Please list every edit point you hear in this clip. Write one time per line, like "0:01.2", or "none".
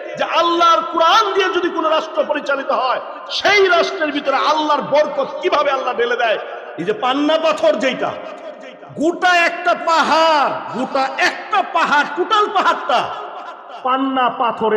0:06.5